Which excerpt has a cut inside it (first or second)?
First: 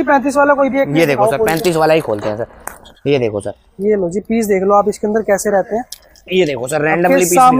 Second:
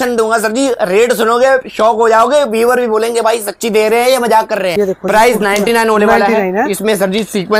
second